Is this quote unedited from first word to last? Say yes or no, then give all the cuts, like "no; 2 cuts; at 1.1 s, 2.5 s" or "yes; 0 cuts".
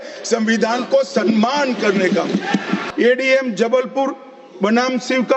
yes; 0 cuts